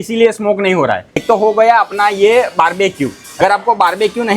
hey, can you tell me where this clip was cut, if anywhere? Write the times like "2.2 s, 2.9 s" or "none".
1.1 s, 3.2 s